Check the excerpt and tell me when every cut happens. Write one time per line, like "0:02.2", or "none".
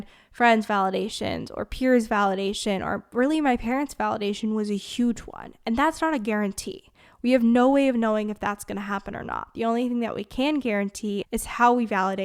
0:11.2